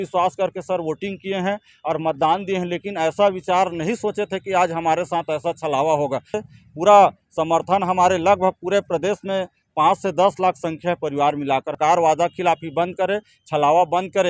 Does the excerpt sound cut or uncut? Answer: cut